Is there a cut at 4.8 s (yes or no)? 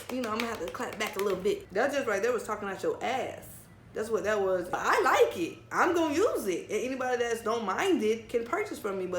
yes